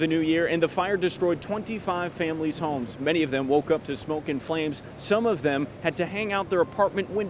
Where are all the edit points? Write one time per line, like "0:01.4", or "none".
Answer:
none